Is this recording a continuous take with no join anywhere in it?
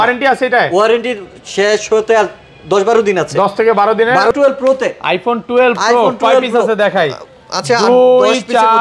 no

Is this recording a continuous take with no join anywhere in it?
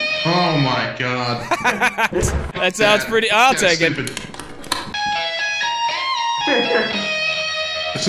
yes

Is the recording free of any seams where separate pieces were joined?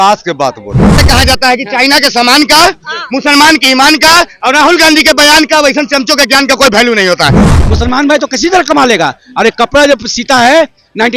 no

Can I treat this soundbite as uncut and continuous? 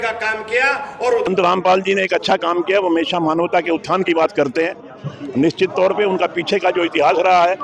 no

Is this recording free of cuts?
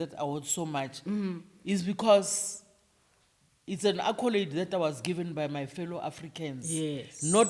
yes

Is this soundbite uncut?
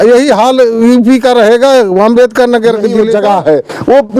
no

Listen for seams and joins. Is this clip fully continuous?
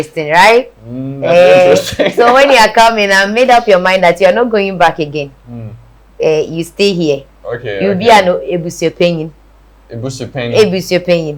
yes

